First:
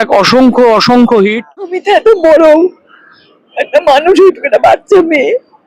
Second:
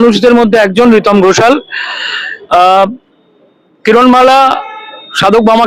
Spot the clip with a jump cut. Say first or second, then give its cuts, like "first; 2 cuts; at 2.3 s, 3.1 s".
first; 1 cut; at 1.8 s